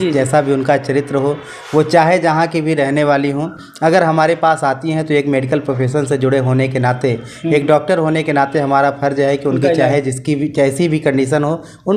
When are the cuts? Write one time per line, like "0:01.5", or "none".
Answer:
none

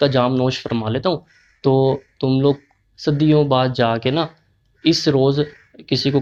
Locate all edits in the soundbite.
none

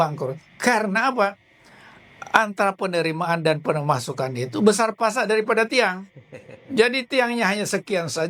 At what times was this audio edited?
none

